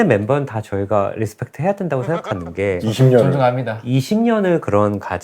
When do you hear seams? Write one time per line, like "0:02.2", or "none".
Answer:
none